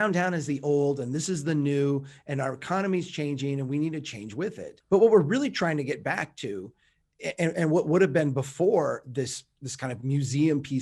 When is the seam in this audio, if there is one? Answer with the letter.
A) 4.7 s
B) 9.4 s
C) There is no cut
A